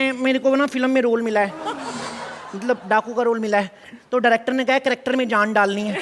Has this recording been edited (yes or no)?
no